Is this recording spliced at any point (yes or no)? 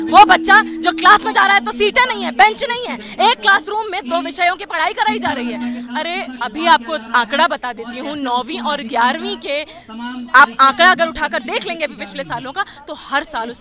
no